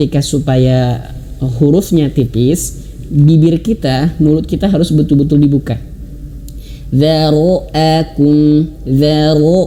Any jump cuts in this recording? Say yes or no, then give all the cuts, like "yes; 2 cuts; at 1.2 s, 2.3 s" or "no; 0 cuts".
no; 0 cuts